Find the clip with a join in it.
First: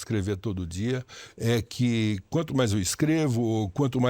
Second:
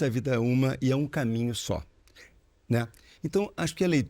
second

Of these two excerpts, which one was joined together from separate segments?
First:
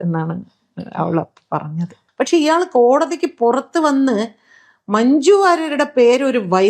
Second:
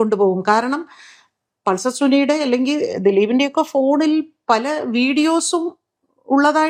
first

